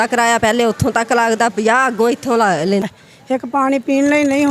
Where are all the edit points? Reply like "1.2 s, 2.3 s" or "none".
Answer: 3.0 s